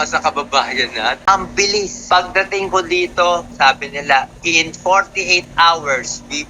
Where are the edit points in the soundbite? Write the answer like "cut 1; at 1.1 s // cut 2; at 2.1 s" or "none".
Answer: cut 1; at 1.2 s